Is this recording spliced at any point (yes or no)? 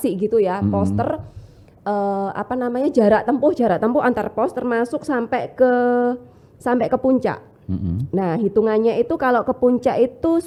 no